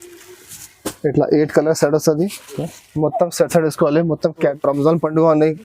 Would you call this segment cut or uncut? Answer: cut